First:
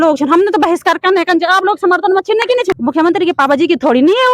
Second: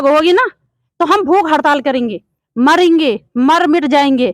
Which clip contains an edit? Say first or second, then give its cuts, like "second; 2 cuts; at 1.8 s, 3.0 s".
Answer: first; 1 cut; at 2.8 s